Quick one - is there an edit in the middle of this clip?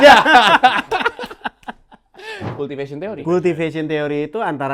yes; 1 cut; at 2.5 s

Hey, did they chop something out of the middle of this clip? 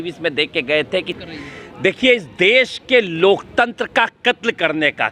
yes; 1 cut; at 1.1 s

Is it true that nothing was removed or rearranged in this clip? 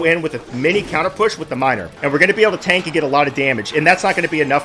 yes; 0 cuts

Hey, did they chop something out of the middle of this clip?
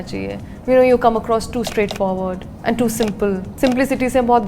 yes; 1 cut; at 3.5 s

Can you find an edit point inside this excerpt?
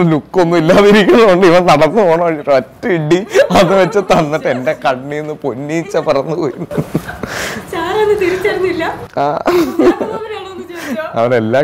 no; 0 cuts

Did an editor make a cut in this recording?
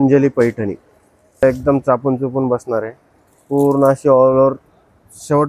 yes; 1 cut; at 1.4 s

